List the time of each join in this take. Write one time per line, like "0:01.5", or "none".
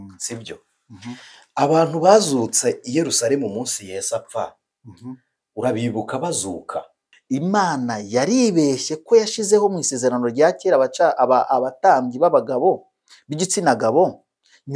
0:07.1